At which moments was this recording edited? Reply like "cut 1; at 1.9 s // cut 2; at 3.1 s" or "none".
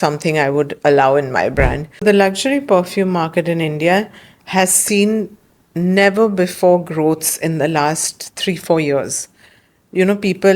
cut 1; at 1.9 s